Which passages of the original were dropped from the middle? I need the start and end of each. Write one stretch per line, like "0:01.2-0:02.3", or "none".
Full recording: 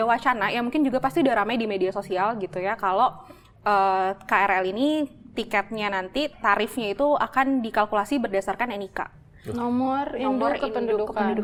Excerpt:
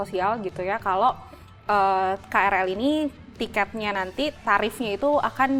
none